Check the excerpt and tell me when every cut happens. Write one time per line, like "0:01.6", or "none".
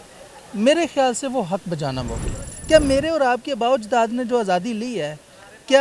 0:02.5